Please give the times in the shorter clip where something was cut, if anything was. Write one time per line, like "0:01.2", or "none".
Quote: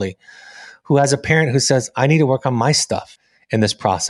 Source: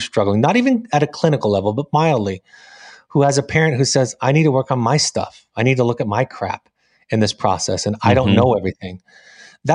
0:03.2